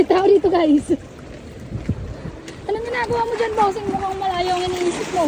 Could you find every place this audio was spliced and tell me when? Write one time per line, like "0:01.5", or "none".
none